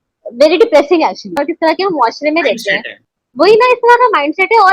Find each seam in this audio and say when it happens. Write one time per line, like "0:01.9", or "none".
0:01.4